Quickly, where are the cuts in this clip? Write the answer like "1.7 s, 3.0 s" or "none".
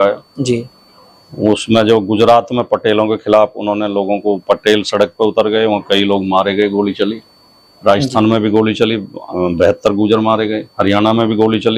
none